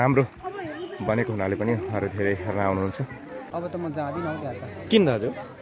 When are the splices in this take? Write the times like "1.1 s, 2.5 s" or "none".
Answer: 3.5 s